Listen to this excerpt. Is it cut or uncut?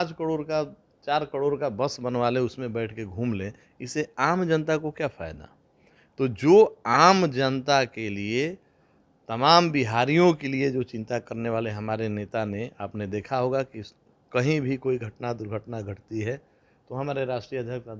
uncut